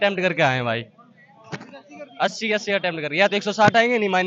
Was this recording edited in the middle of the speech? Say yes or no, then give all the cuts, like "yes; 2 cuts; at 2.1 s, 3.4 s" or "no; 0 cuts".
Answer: no; 0 cuts